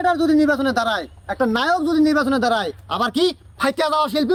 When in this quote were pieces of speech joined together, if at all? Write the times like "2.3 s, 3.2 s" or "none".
none